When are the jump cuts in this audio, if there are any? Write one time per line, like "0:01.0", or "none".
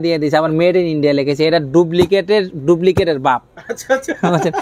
none